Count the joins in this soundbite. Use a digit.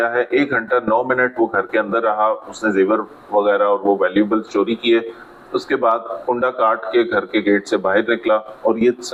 0